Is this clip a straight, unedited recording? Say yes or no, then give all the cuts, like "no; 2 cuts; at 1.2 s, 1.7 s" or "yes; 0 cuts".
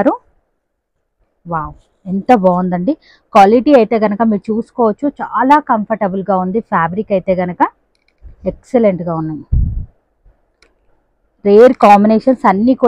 yes; 0 cuts